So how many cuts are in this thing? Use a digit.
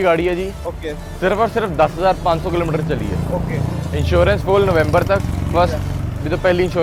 0